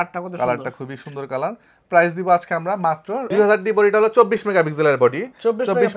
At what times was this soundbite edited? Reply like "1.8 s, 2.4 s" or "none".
3.3 s

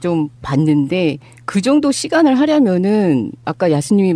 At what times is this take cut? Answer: 1.8 s

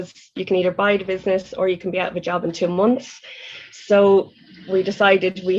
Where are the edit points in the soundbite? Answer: none

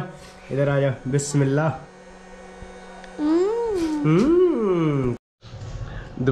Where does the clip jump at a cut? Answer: 5.2 s

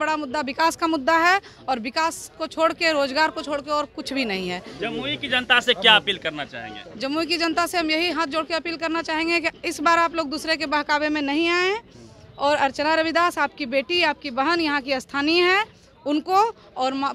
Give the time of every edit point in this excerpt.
none

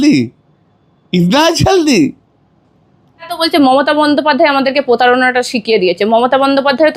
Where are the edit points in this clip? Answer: 3.3 s

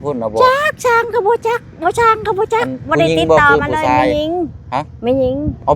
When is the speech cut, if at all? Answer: none

